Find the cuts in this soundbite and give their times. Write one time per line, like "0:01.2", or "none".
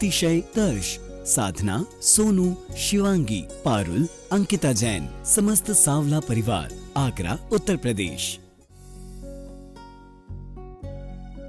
0:08.2